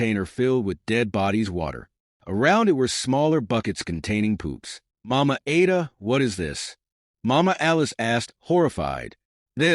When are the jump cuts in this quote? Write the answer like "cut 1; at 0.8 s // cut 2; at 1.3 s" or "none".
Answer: cut 1; at 5.1 s